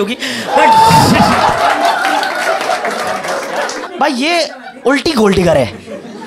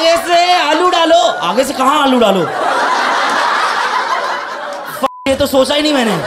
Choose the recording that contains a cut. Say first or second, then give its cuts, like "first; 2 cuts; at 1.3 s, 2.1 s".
first; 1 cut; at 3.9 s